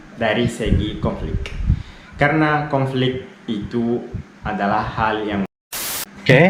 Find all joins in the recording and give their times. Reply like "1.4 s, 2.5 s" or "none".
5.5 s